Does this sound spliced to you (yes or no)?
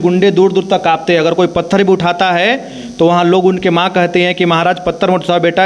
no